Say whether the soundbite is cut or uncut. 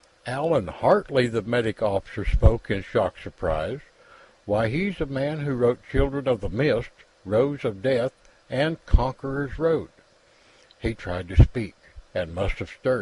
cut